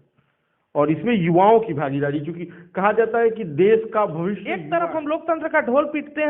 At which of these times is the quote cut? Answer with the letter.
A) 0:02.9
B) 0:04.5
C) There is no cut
B